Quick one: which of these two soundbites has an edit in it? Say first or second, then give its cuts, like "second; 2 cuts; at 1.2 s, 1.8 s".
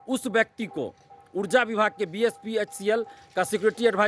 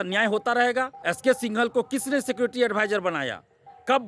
second; 1 cut; at 0.9 s